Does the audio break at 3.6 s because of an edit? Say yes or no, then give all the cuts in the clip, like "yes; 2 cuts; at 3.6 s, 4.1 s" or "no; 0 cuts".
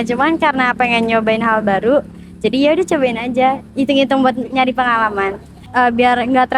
no; 1 cut; at 5.6 s